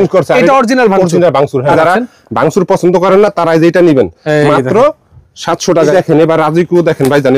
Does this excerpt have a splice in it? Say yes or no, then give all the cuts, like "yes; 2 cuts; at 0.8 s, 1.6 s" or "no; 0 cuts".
yes; 2 cuts; at 1.8 s, 5.9 s